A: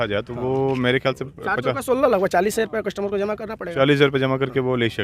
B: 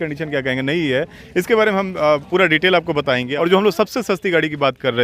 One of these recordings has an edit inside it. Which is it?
B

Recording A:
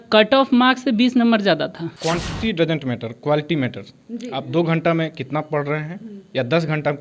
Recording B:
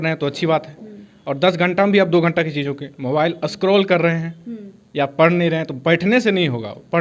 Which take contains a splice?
A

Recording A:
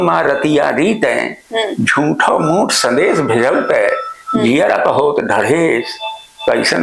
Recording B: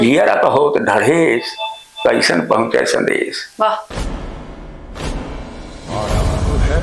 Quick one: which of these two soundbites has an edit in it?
B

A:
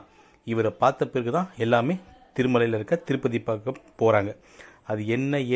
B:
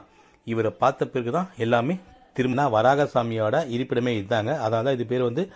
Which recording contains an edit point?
B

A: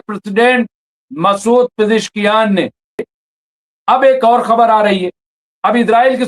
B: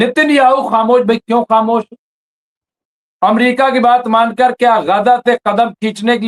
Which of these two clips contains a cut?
A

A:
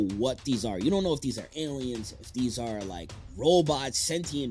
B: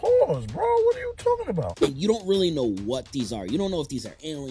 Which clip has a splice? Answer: B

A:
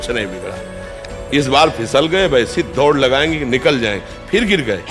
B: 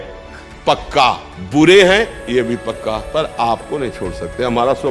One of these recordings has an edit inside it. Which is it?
B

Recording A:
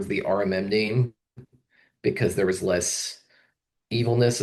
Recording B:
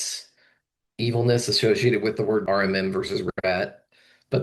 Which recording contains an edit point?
B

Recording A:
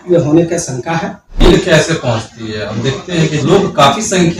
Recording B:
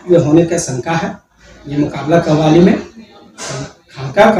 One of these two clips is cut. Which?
A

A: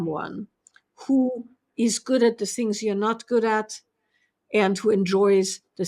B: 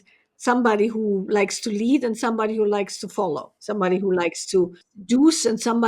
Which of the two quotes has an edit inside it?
B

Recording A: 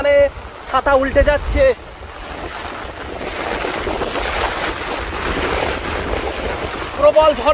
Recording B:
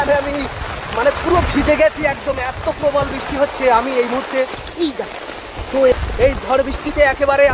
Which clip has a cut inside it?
B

